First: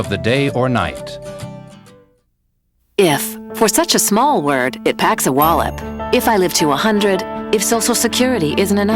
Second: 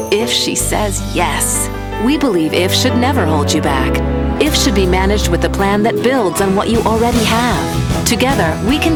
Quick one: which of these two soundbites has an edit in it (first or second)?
first